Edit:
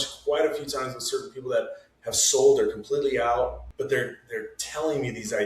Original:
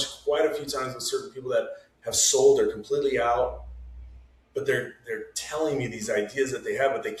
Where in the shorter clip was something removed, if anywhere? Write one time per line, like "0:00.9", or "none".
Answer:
0:03.6